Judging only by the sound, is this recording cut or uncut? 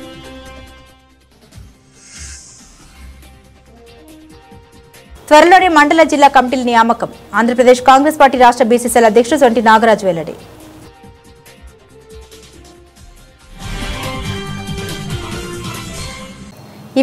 uncut